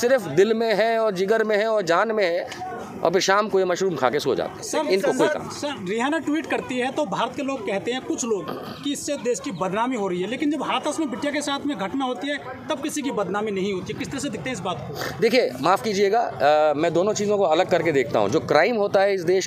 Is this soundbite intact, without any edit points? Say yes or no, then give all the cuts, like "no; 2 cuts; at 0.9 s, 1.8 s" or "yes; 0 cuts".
yes; 0 cuts